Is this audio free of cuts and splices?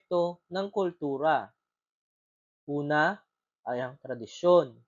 yes; 0 cuts

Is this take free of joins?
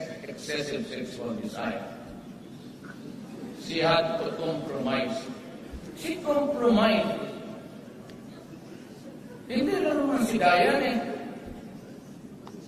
no; 1 cut; at 6.7 s

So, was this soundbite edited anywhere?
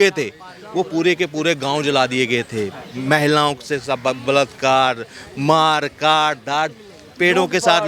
no; 0 cuts

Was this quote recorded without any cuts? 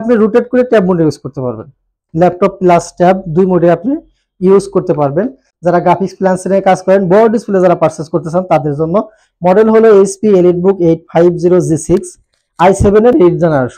no; 1 cut; at 5.5 s

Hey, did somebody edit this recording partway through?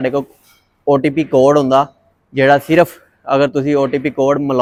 no; 0 cuts

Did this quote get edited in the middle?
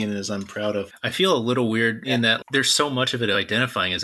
yes; 3 cuts; at 0.9 s, 2.1 s, 3.4 s

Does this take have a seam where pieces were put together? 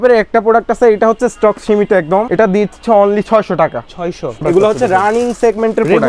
yes; 2 cuts; at 2.3 s, 4.4 s

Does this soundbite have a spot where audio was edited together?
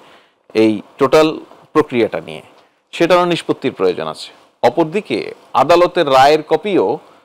no; 0 cuts

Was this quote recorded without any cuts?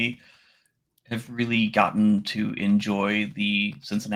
yes; 0 cuts

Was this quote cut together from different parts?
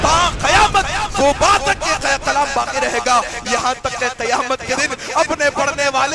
no; 0 cuts

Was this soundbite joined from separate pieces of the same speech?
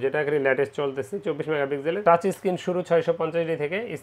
yes; 1 cut; at 2.0 s

